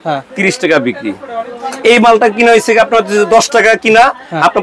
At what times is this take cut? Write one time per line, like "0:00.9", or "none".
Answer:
none

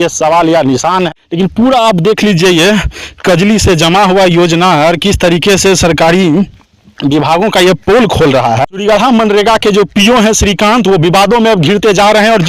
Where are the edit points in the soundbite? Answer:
0:01.1
0:08.7

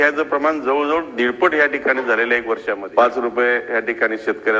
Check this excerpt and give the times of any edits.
0:02.8

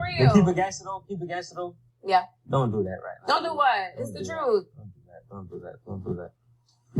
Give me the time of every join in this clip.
0:04.6

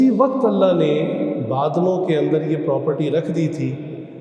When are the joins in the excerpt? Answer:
none

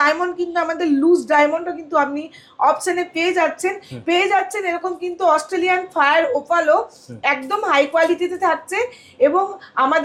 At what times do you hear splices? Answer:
none

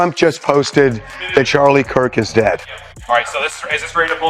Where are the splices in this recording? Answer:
none

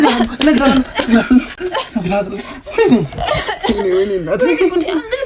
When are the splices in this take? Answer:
none

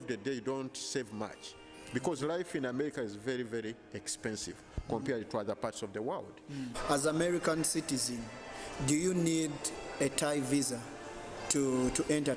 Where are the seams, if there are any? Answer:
0:06.8

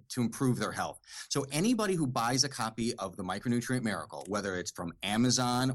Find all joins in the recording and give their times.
none

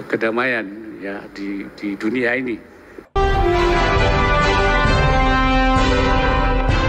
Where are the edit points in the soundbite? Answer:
0:03.2

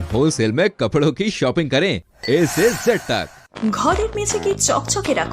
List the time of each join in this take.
0:03.5

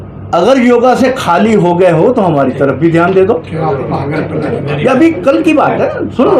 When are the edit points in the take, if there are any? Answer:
none

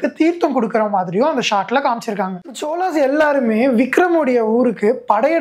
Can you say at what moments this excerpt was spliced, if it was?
0:02.5

